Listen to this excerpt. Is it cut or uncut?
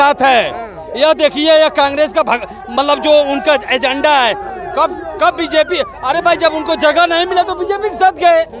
uncut